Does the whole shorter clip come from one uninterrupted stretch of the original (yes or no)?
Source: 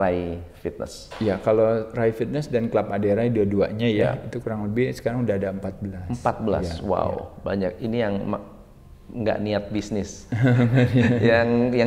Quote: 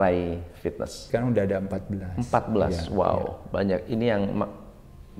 no